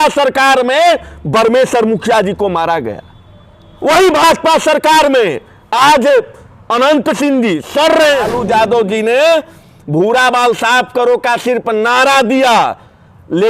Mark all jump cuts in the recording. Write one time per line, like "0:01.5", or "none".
0:08.3